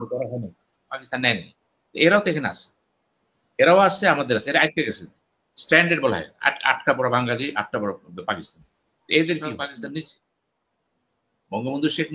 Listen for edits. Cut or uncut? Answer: cut